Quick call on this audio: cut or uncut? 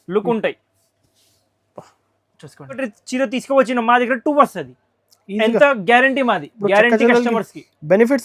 cut